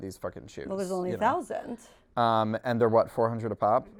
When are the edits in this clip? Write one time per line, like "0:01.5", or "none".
none